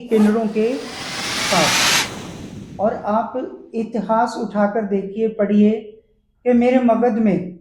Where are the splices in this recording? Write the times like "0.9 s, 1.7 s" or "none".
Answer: none